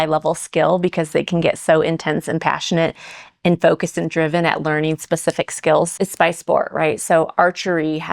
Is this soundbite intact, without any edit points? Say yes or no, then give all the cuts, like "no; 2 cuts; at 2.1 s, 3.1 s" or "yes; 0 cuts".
no; 1 cut; at 5.9 s